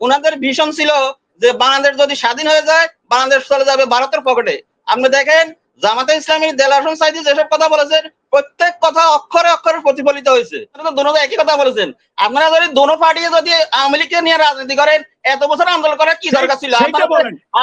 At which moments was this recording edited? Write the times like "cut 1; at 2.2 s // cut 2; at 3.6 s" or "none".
cut 1; at 10.8 s